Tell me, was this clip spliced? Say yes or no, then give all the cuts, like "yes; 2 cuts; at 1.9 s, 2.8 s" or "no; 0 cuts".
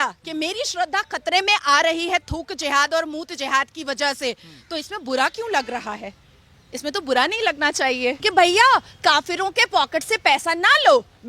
yes; 1 cut; at 8.2 s